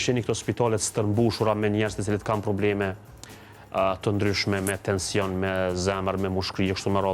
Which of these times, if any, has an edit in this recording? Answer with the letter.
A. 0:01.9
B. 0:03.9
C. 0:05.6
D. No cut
D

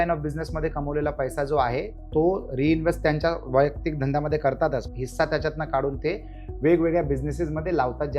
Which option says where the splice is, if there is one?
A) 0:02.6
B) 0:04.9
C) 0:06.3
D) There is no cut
B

